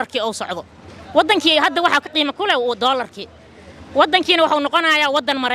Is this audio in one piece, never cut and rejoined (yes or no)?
yes